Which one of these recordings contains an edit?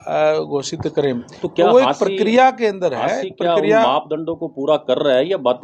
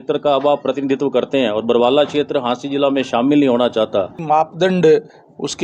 second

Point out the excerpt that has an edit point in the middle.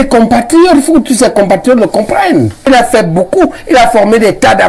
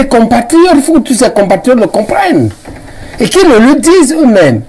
first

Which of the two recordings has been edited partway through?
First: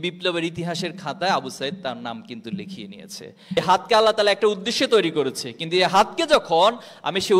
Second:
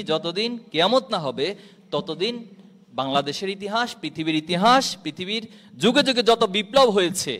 first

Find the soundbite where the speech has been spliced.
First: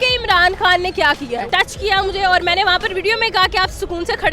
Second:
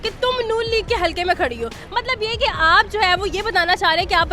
first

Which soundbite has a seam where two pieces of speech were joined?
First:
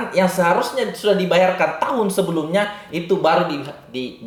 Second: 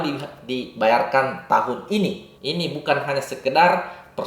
second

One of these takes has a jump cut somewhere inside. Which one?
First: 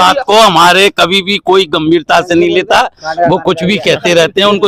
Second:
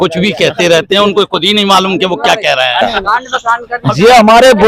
second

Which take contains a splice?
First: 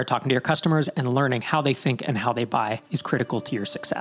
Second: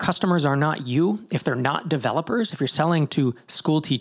first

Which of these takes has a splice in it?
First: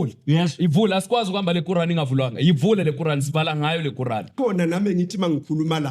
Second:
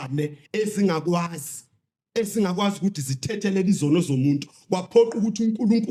first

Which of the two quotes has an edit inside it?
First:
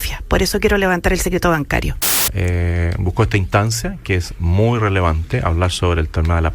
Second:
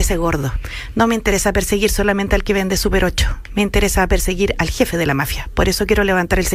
first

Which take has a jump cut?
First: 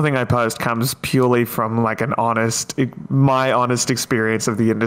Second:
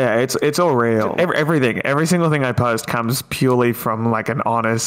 second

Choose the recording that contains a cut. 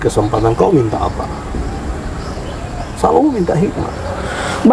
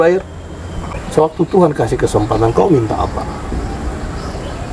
second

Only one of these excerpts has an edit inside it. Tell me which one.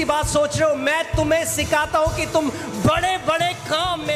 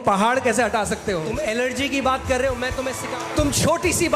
second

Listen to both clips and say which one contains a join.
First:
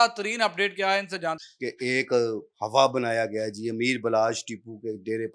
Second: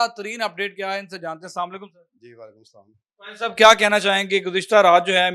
first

